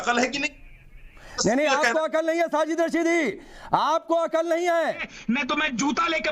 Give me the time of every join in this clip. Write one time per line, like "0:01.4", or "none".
0:01.3
0:05.1